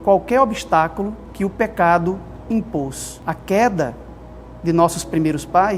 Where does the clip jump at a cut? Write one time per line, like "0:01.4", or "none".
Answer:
0:01.2
0:03.1